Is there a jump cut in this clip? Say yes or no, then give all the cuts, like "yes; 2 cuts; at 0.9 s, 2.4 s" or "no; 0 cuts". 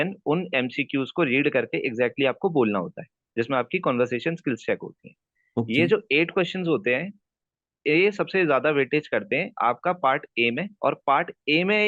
no; 0 cuts